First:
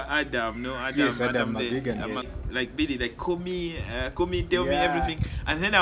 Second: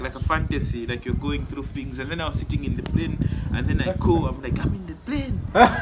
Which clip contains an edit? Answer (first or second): first